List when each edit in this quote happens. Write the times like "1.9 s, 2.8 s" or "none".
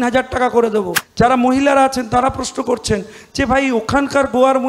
1.0 s